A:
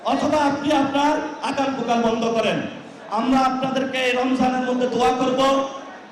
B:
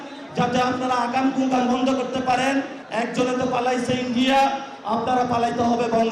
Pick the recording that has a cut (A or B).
B